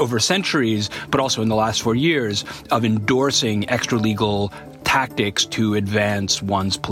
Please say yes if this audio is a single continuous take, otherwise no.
yes